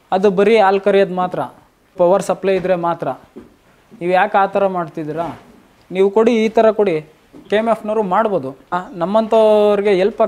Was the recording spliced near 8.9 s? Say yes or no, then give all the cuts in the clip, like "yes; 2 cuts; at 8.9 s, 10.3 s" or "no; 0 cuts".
yes; 3 cuts; at 1.9 s, 7.4 s, 8.9 s